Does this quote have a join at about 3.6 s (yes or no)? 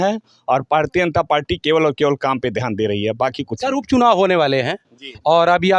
no